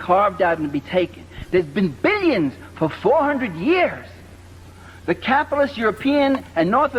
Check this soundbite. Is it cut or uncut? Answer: uncut